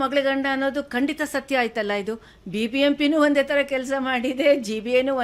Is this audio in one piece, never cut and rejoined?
yes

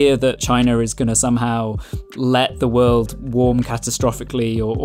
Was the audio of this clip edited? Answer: yes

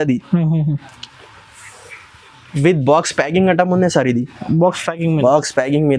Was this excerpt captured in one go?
yes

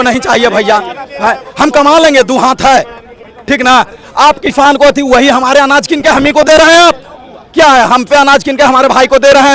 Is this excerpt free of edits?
yes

